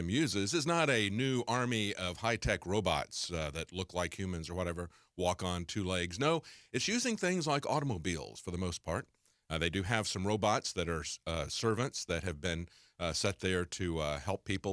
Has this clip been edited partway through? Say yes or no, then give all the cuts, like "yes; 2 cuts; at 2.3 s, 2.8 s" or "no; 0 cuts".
no; 0 cuts